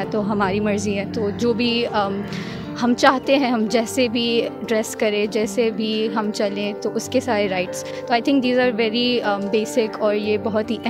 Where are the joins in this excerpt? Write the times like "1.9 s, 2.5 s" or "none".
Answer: none